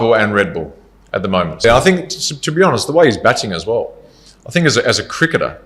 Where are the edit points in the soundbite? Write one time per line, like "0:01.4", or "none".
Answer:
0:01.6